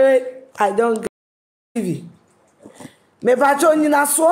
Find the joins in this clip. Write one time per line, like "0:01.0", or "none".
0:01.1